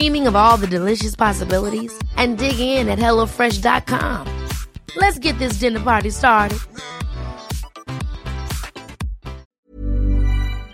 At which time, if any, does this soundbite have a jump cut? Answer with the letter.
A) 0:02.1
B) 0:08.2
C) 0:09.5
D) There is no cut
C